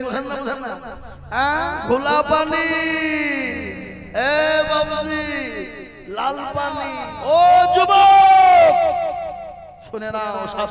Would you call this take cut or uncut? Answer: cut